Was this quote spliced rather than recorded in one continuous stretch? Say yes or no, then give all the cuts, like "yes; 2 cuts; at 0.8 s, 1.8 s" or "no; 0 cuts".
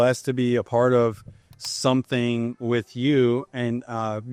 no; 0 cuts